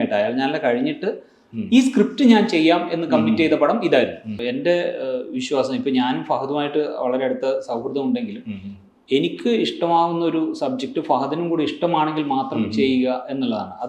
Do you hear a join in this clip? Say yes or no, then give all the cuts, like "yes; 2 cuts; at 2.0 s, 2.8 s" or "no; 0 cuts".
yes; 1 cut; at 4.5 s